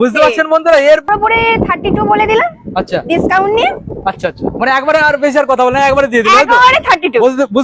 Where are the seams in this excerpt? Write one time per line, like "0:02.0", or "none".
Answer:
0:01.1